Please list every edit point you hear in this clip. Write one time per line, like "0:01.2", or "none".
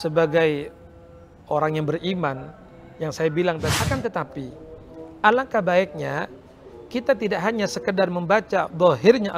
0:03.7